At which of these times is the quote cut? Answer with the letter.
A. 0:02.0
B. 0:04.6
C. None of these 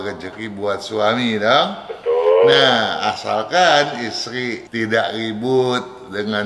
B